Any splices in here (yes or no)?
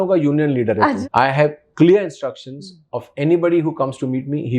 yes